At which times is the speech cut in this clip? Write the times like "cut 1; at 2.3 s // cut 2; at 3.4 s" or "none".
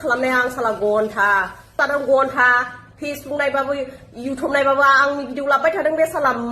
cut 1; at 1.8 s